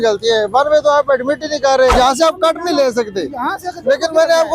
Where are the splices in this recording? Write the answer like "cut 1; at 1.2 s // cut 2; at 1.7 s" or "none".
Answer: cut 1; at 1.9 s